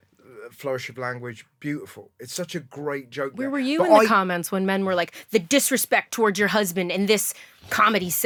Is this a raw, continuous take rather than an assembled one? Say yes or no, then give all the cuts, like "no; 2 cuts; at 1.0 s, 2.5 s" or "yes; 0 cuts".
yes; 0 cuts